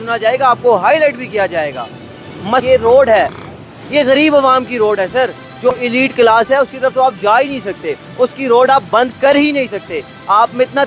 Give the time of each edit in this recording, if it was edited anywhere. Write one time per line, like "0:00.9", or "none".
0:02.6
0:05.7

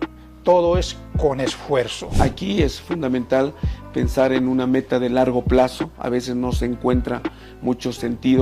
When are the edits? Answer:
0:02.1

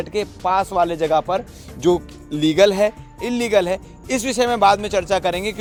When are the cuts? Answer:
none

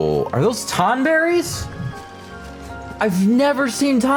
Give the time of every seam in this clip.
none

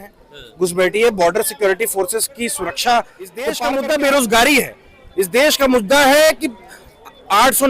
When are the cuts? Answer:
0:03.5

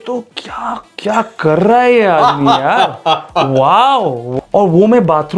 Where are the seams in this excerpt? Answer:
0:04.3

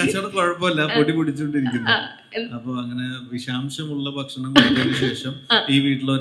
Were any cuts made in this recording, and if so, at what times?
none

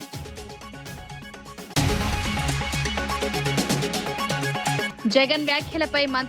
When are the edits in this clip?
0:01.7
0:03.1
0:04.5

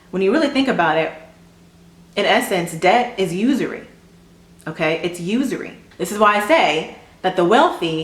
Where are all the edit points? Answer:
0:05.8

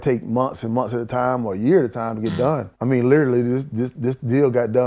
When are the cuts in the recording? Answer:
0:02.7

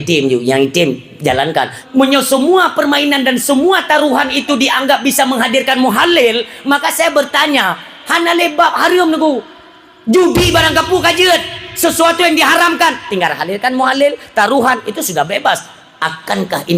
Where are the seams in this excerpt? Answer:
0:01.8

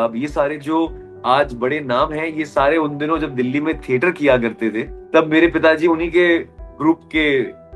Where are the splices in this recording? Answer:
0:04.9

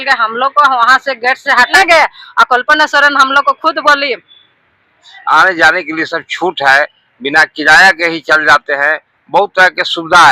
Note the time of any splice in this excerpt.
0:01.7
0:05.1

